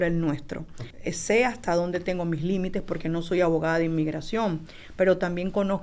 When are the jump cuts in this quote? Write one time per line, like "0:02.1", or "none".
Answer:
0:00.9